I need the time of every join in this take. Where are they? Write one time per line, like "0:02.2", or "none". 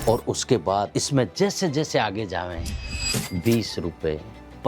0:01.0